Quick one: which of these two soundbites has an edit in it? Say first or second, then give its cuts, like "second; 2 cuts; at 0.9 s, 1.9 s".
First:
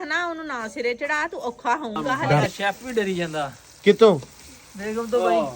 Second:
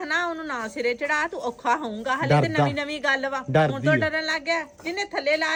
first; 1 cut; at 2.5 s